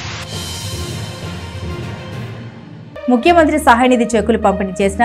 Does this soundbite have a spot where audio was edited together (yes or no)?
yes